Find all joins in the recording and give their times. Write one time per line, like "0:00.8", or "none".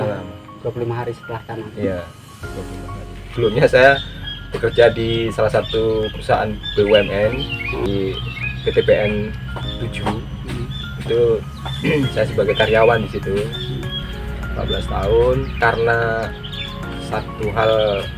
0:03.3
0:07.9
0:14.1
0:15.5